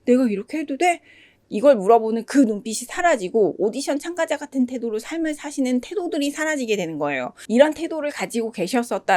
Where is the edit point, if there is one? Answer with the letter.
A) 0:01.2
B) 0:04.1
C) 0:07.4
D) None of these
C